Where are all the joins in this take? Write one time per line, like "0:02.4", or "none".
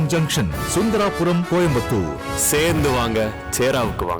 none